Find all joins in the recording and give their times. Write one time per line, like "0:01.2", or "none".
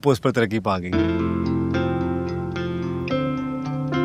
none

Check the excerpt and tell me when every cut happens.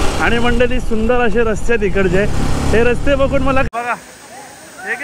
0:03.7

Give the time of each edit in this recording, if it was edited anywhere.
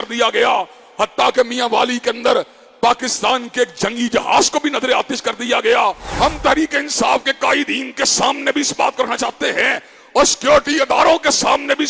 0:06.0

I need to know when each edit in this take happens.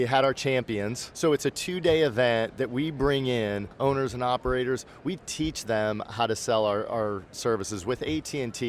0:01.1
0:03.7

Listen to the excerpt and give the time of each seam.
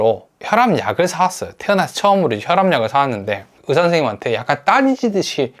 0:03.6

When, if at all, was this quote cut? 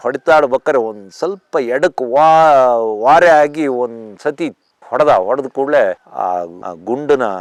none

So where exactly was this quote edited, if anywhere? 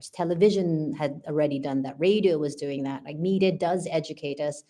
none

